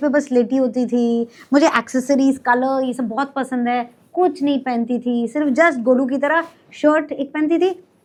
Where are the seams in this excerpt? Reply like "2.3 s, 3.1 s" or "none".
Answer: none